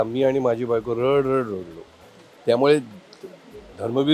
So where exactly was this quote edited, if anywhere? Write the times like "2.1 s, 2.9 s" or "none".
none